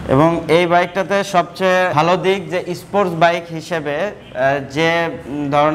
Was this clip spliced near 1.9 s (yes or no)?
yes